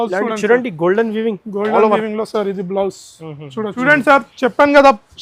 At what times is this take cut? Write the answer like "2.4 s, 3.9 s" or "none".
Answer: 3.7 s